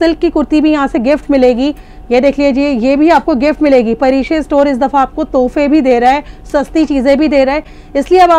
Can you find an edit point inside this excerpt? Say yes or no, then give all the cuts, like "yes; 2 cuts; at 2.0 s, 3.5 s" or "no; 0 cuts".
no; 0 cuts